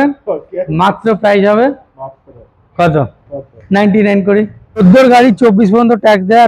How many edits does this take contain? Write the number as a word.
one